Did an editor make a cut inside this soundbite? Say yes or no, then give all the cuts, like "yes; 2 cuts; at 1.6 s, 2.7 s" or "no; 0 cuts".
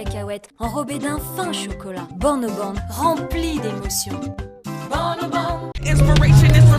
yes; 1 cut; at 5.7 s